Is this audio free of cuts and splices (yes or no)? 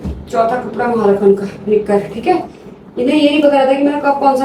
yes